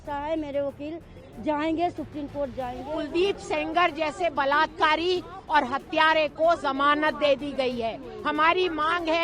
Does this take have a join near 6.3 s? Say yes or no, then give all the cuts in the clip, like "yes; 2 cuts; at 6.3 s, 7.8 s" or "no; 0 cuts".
no; 1 cut; at 3.0 s